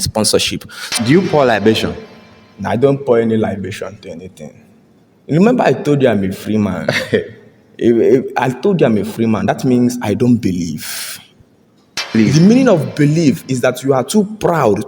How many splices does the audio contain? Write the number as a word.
two